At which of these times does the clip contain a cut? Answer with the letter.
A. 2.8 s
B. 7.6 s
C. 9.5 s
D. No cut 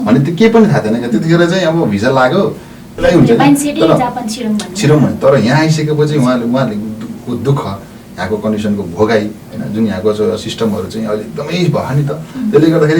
A